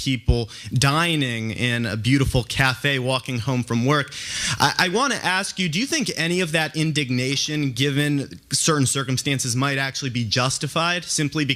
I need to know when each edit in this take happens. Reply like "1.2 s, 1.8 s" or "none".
none